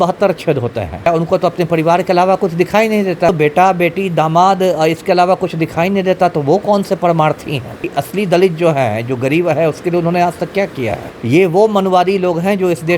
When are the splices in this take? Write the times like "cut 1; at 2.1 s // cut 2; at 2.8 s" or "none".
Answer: cut 1; at 1.1 s // cut 2; at 3.3 s // cut 3; at 7.8 s // cut 4; at 11.1 s